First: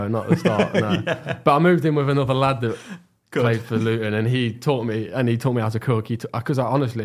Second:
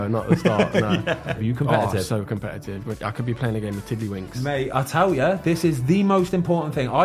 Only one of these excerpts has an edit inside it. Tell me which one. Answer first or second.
second